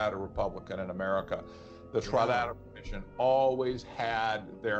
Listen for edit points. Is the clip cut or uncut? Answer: uncut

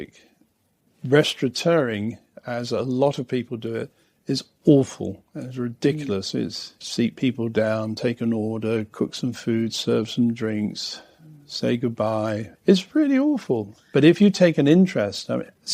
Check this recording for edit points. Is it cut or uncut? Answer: cut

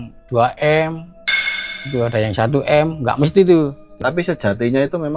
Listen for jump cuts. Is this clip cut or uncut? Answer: cut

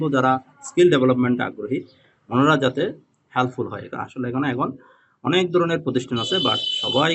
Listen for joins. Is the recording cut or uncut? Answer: uncut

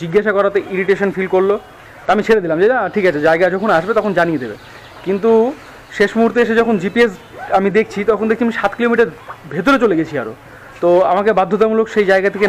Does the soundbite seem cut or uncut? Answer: uncut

